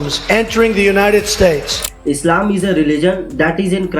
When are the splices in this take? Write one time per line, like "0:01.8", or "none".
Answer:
0:01.9